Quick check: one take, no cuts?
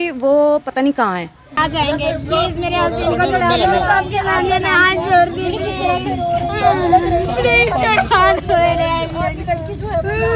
no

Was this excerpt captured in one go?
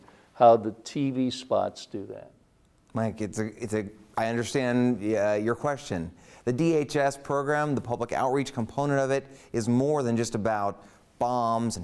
yes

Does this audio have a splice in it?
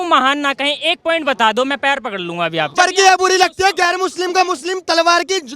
yes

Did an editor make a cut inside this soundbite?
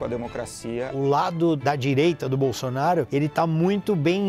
yes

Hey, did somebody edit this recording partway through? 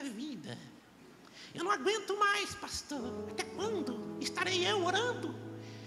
no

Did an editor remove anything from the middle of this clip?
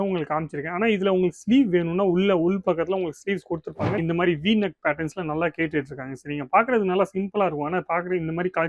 yes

